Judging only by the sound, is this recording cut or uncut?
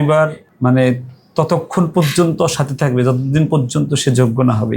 uncut